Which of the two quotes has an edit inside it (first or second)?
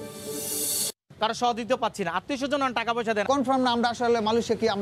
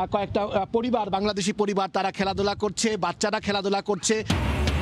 first